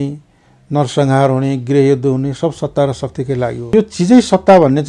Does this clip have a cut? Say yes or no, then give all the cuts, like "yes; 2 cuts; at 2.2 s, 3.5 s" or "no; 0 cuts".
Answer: yes; 1 cut; at 3.6 s